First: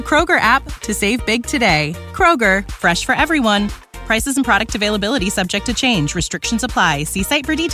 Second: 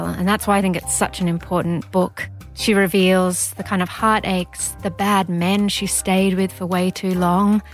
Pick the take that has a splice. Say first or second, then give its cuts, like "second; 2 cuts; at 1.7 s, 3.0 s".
second; 1 cut; at 2.3 s